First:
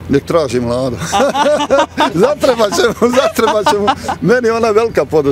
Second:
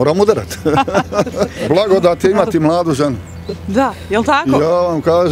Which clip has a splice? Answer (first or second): second